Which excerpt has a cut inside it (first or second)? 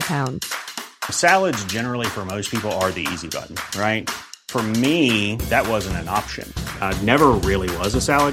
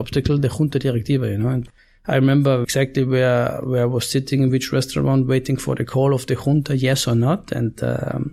second